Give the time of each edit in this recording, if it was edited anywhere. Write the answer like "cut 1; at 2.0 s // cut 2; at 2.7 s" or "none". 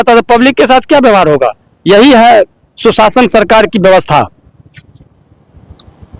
none

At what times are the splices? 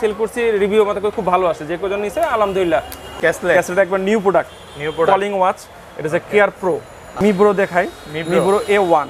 cut 1; at 3.0 s // cut 2; at 7.1 s

